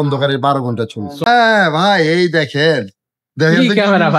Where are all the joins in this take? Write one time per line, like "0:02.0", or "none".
0:01.2